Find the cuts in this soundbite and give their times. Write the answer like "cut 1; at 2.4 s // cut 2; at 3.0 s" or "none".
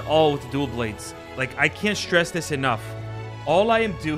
none